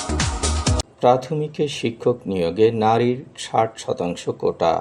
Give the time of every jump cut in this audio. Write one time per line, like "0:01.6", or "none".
0:00.9